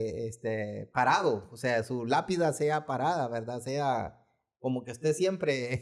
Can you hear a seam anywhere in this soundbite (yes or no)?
no